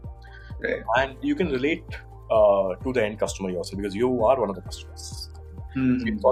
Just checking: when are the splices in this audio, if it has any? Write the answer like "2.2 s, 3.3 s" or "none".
none